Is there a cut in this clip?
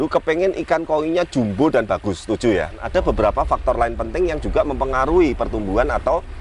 yes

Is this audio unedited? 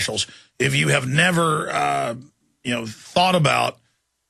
yes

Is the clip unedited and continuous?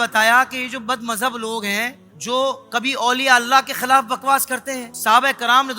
no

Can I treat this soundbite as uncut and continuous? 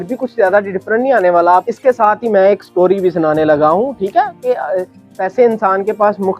no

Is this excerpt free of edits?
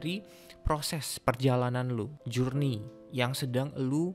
no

